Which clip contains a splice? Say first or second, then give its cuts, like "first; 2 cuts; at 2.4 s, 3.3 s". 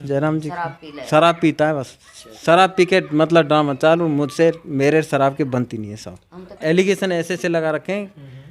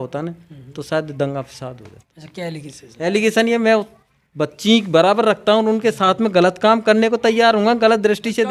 first; 1 cut; at 6.5 s